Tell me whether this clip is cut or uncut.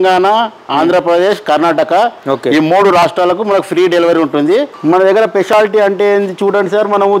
cut